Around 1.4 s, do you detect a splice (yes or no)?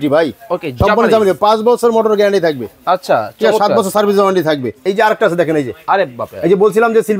no